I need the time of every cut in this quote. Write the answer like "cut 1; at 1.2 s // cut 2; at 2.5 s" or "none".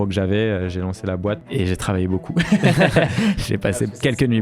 cut 1; at 1.4 s